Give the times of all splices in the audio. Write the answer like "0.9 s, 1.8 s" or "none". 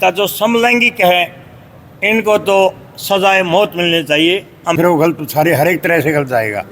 4.8 s